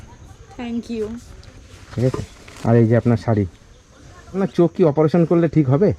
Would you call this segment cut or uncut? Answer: cut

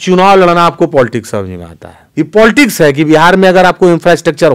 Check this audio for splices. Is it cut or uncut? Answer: cut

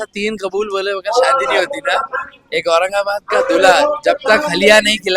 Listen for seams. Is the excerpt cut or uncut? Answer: uncut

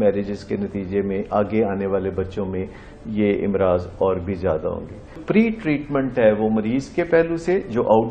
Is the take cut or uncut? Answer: cut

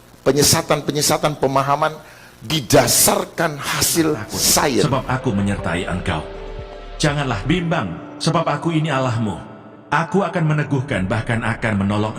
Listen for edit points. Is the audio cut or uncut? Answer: cut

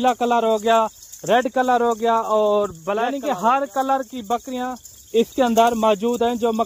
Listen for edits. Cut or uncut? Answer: cut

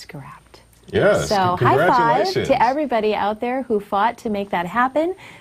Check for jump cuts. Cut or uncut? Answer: cut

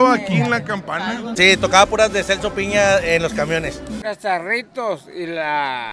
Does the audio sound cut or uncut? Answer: cut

